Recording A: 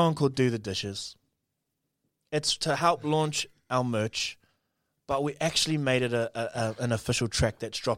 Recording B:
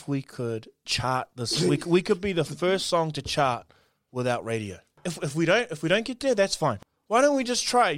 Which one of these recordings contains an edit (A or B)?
B